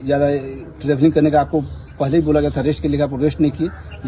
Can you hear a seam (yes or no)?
no